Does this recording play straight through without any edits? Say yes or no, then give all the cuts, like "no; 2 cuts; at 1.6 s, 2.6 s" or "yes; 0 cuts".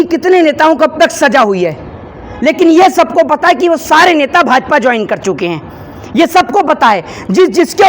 yes; 0 cuts